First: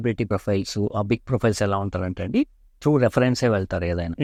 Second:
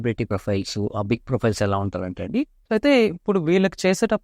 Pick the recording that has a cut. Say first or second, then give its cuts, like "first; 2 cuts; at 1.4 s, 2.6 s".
second; 1 cut; at 2.6 s